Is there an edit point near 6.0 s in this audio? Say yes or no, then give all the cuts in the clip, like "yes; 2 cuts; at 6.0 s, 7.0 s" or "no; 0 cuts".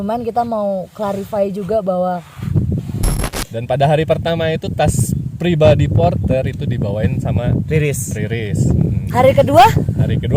no; 1 cut; at 3.0 s